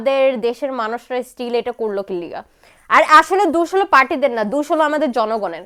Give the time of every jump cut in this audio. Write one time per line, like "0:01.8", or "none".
none

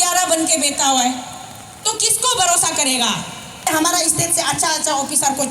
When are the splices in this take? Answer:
0:03.6

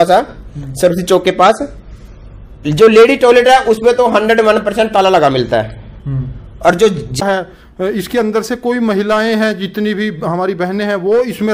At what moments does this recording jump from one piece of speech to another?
0:07.2

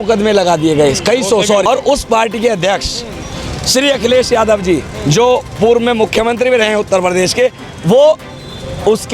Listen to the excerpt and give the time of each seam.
0:01.6

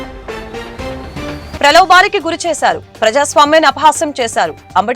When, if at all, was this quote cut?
0:01.5

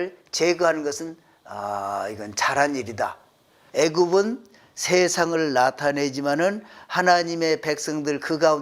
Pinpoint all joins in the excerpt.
0:03.6

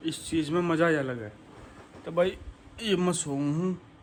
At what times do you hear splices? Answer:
none

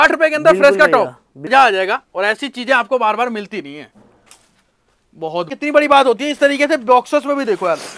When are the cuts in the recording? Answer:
0:01.5
0:05.5

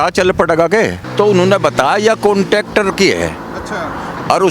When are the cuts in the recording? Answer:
0:01.0

